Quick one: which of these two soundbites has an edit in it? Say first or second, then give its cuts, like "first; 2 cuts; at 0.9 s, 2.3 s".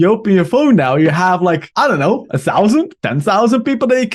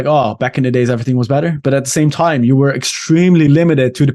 first; 2 cuts; at 1.7 s, 3.0 s